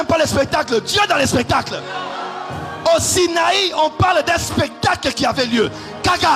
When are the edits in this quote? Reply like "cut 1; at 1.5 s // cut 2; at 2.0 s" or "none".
none